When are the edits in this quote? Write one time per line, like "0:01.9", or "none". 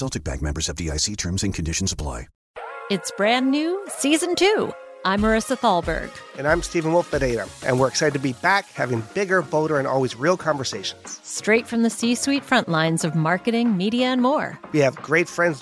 0:02.4